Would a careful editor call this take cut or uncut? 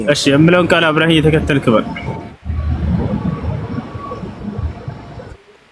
uncut